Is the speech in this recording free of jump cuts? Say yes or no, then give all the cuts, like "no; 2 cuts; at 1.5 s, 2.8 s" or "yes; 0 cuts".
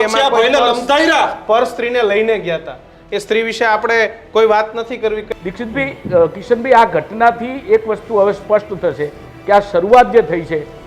no; 1 cut; at 5.2 s